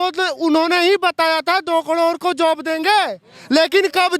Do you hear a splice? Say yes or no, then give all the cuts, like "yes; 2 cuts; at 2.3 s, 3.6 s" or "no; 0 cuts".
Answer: no; 0 cuts